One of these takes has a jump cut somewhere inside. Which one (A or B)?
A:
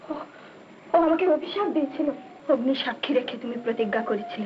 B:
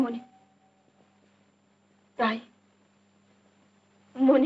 A